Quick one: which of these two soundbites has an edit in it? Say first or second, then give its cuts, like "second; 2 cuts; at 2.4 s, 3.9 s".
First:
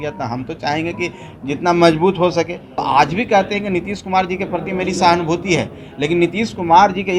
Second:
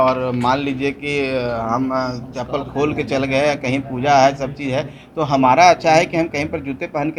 first; 1 cut; at 2.8 s